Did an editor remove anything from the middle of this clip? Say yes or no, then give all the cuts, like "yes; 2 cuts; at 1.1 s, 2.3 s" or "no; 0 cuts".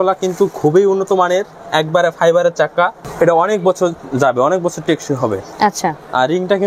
no; 0 cuts